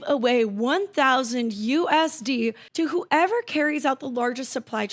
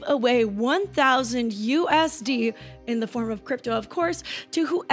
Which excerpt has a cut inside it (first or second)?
first